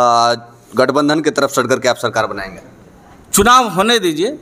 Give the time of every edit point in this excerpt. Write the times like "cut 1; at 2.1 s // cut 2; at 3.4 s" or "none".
none